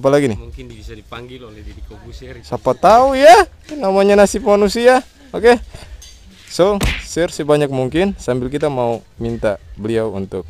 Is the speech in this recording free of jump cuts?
yes; 0 cuts

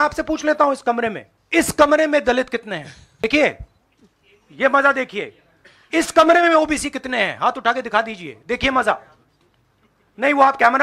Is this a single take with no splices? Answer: no; 2 cuts; at 1.3 s, 3.2 s

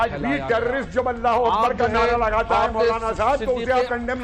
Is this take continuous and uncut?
yes; 0 cuts

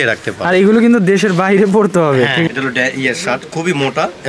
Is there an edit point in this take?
yes; 1 cut; at 2.5 s

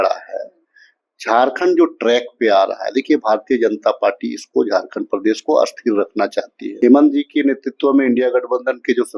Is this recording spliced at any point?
yes; 1 cut; at 6.6 s

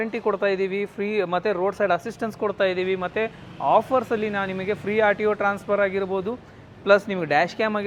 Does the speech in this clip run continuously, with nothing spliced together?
yes; 0 cuts

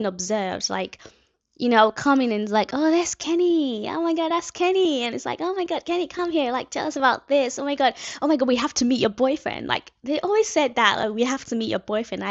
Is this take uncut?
yes; 0 cuts

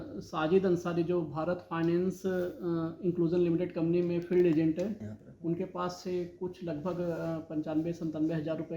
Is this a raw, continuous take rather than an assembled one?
no; 1 cut; at 5.0 s

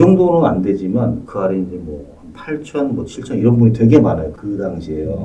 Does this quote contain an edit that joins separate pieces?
no; 0 cuts

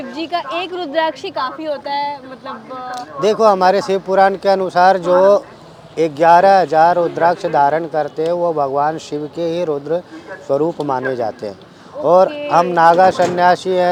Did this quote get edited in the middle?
no; 0 cuts

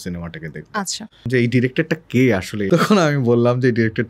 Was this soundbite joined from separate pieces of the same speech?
yes; 2 cuts; at 1.3 s, 2.6 s

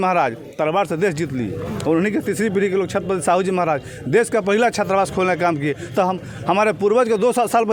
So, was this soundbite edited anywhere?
no; 0 cuts

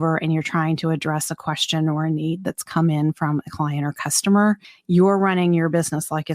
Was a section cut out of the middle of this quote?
yes; 1 cut; at 4.7 s

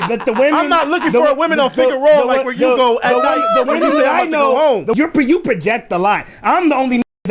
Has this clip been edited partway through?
yes; 1 cut; at 4.9 s

